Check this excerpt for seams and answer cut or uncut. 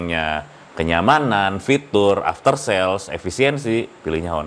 uncut